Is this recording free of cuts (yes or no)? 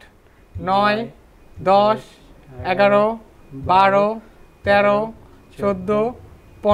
yes